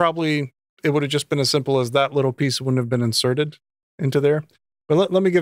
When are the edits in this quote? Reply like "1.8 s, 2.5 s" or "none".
none